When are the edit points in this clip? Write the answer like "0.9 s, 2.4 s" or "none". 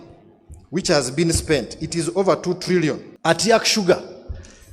3.1 s